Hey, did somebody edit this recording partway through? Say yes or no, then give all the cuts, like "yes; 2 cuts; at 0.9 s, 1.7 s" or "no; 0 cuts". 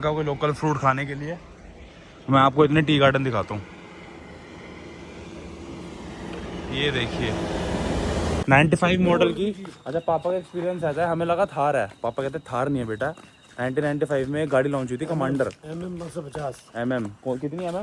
yes; 1 cut; at 8.4 s